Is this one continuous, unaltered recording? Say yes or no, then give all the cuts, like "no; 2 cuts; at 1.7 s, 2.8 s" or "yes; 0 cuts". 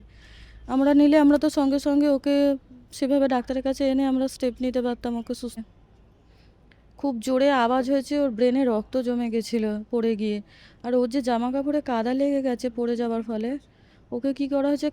no; 1 cut; at 5.6 s